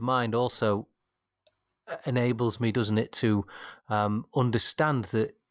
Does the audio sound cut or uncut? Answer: uncut